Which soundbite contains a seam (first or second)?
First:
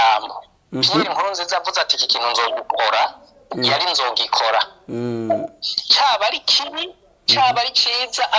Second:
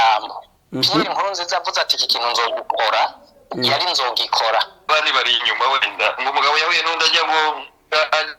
second